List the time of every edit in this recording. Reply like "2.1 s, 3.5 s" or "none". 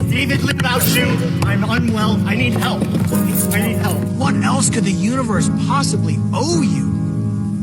0.9 s